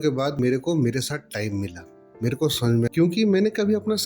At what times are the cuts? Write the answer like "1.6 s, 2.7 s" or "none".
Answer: 2.9 s